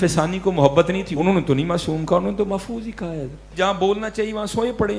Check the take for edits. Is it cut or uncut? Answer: cut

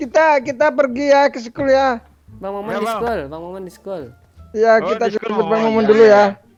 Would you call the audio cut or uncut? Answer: uncut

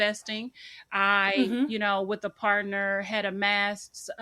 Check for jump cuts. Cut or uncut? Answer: uncut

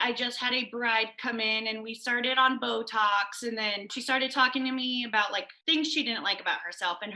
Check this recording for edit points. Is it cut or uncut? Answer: cut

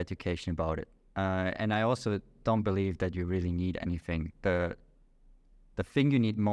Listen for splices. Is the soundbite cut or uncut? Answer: uncut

